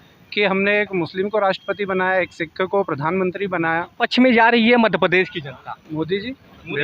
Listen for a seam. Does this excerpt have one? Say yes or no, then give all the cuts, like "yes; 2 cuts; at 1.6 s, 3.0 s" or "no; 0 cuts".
yes; 1 cut; at 4.0 s